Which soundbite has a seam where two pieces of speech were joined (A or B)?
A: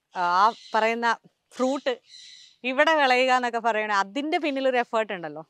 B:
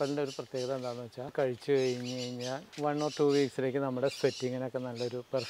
B